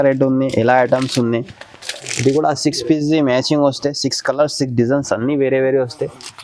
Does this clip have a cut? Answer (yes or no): no